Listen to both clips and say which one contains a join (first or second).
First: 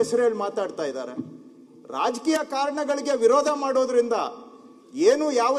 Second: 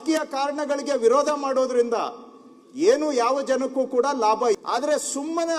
second